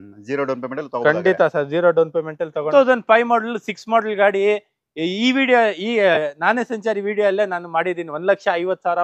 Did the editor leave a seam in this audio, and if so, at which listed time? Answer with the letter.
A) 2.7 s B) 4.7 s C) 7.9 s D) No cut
A